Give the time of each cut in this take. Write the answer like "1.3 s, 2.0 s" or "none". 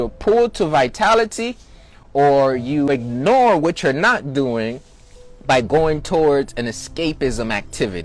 2.9 s